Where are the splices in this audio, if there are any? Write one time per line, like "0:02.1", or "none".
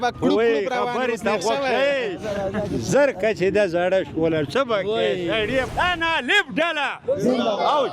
0:05.7